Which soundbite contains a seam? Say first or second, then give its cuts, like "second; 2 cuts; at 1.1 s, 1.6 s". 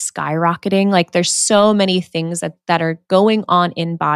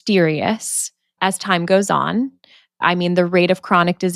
second; 1 cut; at 2.8 s